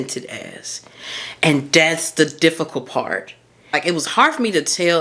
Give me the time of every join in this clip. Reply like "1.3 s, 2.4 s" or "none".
3.7 s